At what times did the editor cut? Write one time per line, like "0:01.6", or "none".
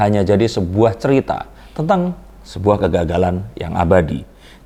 none